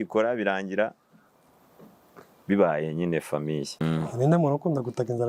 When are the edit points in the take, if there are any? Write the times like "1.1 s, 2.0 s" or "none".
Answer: 3.8 s